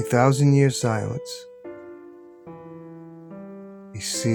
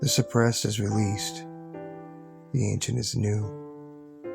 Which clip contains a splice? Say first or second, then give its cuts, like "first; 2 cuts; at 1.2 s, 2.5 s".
second; 1 cut; at 3.4 s